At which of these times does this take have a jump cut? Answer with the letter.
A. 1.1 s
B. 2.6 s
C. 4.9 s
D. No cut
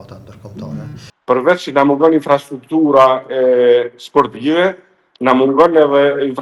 A